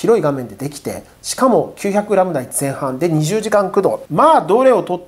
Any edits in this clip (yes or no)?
yes